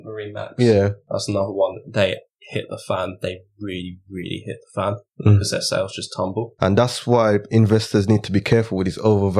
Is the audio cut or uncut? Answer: cut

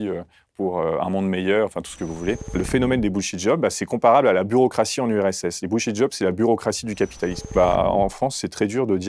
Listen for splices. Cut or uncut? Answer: cut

